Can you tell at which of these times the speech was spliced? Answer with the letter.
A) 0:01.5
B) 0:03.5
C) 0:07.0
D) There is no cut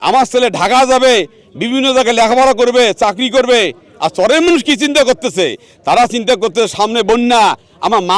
D